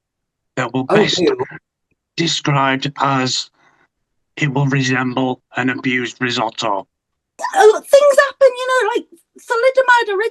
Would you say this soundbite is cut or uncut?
cut